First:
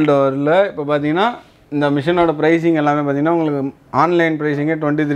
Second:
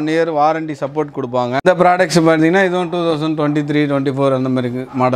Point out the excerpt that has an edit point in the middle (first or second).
second